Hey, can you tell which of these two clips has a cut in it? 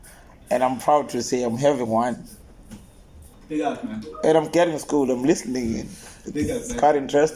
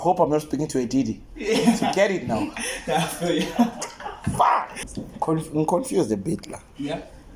second; 1 cut; at 4.8 s

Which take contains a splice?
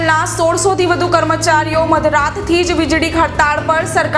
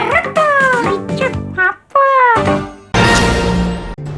second; 1 cut; at 2.8 s

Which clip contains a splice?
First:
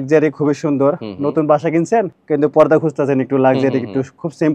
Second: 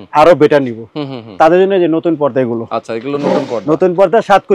first; 1 cut; at 2.2 s

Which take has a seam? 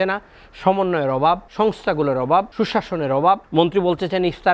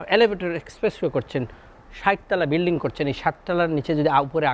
first; 3 cuts; at 1.5 s, 2.5 s, 3.4 s

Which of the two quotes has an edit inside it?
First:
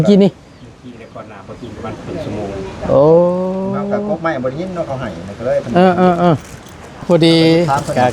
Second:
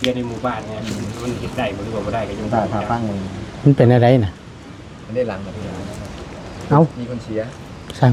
first; 1 cut; at 7.0 s

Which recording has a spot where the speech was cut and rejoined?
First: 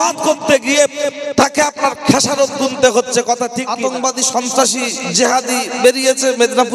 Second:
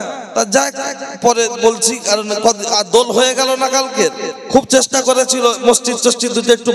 first; 1 cut; at 3.6 s

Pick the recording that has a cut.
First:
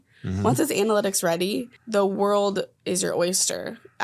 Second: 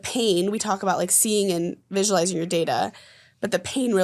first; 2 cuts; at 1.7 s, 2.8 s

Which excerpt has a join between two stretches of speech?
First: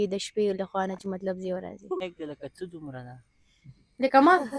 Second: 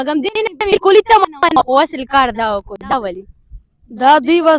first; 1 cut; at 2.0 s

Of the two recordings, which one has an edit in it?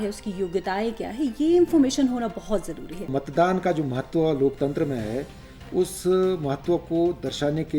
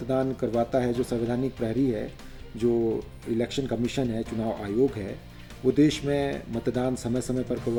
first; 1 cut; at 3.1 s

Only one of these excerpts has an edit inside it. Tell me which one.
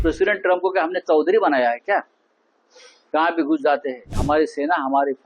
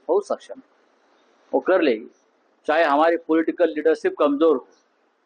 first; 1 cut; at 4.2 s

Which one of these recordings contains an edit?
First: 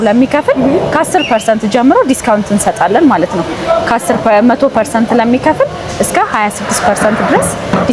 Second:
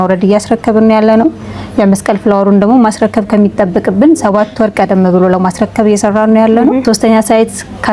second; 1 cut; at 6.8 s

